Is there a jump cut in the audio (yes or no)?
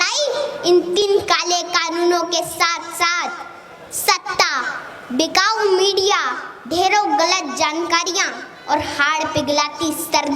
yes